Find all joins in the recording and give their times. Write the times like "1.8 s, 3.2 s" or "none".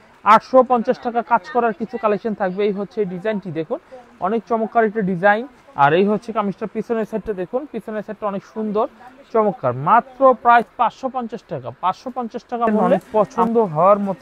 12.9 s